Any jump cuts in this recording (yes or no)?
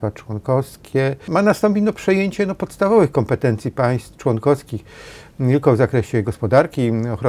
yes